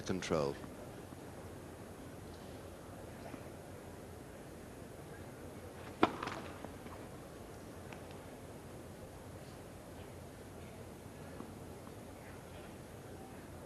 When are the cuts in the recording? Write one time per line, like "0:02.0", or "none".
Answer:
0:07.3